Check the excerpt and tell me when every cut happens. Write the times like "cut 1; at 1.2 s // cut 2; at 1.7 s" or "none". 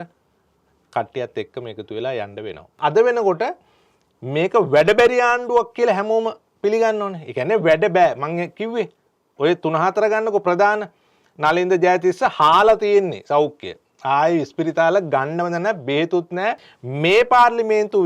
cut 1; at 2.7 s // cut 2; at 16.7 s